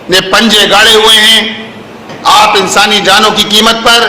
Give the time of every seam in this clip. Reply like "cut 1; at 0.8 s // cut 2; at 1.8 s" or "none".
cut 1; at 2.1 s